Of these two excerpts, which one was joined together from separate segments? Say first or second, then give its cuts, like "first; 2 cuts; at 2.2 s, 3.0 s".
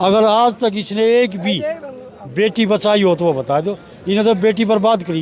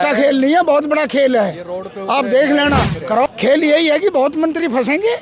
second; 1 cut; at 3.2 s